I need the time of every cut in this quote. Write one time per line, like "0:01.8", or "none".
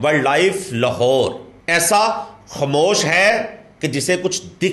0:01.5